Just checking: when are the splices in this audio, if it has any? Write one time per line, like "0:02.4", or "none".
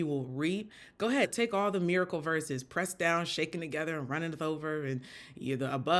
0:01.3